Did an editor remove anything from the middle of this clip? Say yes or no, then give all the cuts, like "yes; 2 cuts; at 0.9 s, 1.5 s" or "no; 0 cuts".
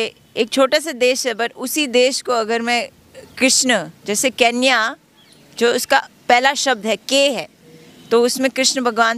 no; 0 cuts